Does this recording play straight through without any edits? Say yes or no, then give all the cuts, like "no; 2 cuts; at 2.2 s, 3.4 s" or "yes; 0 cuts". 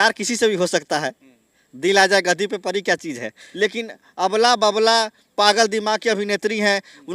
no; 1 cut; at 3.4 s